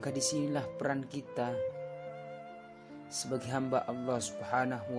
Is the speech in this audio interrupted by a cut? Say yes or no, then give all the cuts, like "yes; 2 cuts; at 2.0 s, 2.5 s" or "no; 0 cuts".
no; 0 cuts